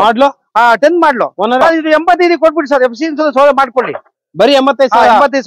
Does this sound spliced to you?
yes; 1 cut; at 1.6 s

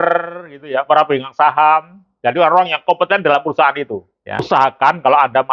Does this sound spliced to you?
yes; 1 cut; at 4.4 s

